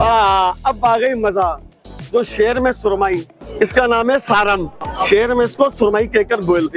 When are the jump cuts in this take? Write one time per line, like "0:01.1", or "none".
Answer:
0:03.4
0:04.8